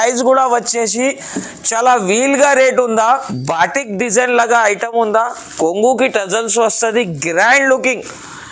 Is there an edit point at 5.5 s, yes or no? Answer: no